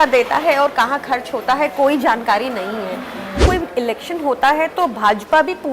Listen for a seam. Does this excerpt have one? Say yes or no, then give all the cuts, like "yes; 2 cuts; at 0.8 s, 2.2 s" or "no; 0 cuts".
yes; 1 cut; at 3.4 s